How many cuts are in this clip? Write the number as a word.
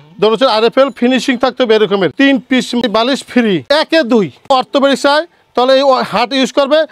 three